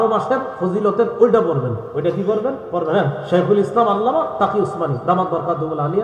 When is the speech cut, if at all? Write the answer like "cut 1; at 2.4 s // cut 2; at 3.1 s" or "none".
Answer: cut 1; at 1.8 s